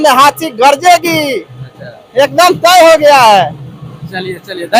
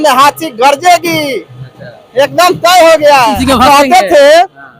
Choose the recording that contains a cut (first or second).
second